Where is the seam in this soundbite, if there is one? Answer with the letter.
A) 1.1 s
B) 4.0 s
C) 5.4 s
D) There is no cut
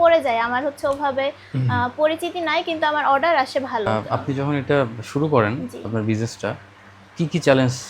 B